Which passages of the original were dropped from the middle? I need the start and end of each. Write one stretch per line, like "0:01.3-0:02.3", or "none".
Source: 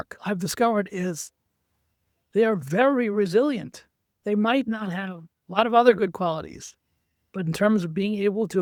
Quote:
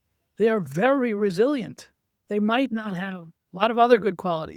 none